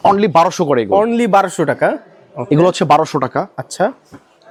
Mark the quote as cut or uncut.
uncut